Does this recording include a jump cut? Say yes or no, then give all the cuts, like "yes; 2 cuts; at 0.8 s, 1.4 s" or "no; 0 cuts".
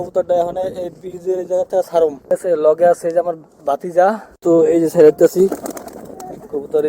yes; 2 cuts; at 2.3 s, 4.3 s